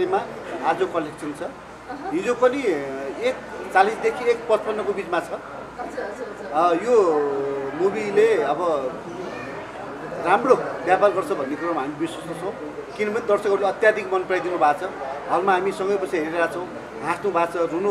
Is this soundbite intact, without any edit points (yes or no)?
yes